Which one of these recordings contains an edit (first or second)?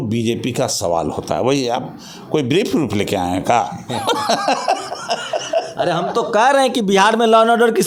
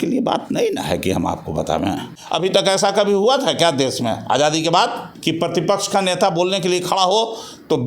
second